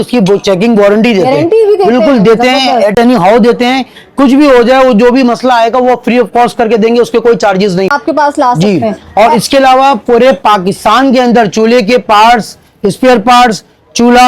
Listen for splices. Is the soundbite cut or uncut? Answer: cut